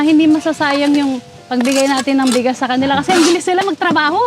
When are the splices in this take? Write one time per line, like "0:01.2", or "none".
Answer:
none